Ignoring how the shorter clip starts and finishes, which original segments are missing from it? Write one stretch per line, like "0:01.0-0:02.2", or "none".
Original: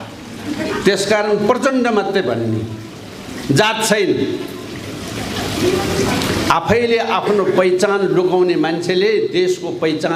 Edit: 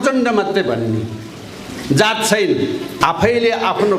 0:04.6-0:06.4

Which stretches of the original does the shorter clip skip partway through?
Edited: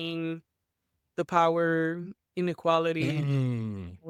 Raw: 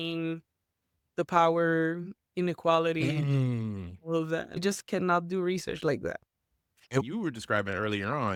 none

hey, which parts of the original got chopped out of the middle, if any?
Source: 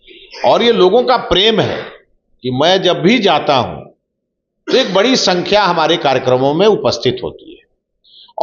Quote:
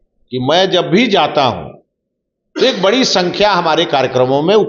none

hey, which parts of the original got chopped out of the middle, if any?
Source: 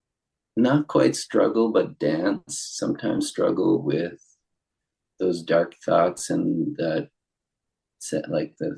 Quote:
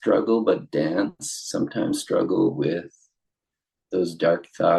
none

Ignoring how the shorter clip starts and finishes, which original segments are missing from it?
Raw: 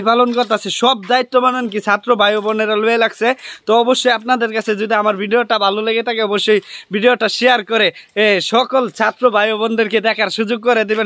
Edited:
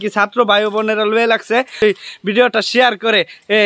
0:03.5-0:06.4

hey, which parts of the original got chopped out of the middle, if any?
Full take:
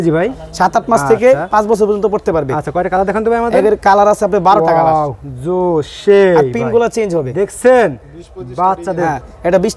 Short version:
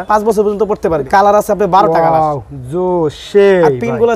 0:02.5-0:03.8

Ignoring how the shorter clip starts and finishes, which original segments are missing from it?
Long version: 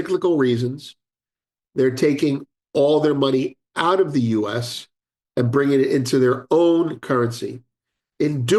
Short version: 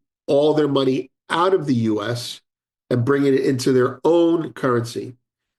none

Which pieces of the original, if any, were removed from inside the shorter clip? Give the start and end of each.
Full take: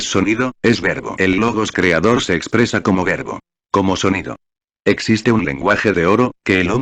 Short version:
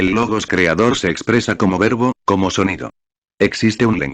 0:03.1-0:03.3

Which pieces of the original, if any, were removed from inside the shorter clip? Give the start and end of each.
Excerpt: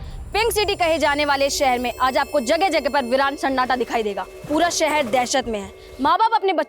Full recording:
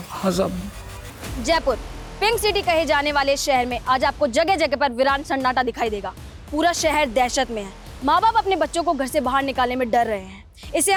0:06.2-0:06.3

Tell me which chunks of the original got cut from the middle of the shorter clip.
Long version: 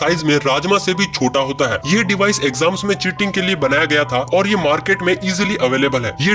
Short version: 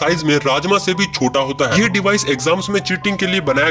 0:01.7-0:01.9

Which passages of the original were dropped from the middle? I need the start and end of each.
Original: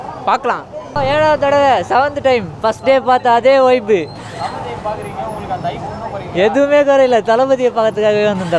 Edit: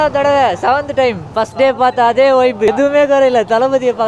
0:04.0-0:06.5

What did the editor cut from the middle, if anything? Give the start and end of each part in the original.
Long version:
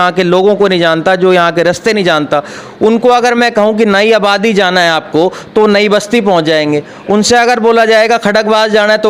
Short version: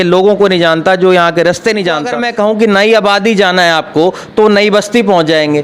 0:02.4-0:03.4

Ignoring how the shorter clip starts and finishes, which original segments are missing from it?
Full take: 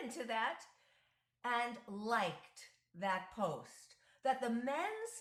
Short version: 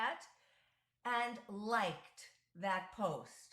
none

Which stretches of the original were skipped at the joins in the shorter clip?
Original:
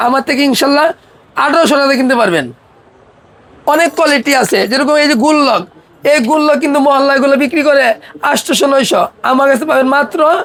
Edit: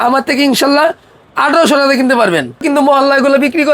0:02.6-0:06.6

